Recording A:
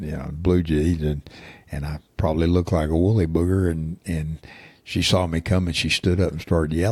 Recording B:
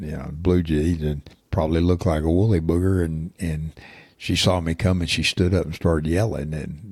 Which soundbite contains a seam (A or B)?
B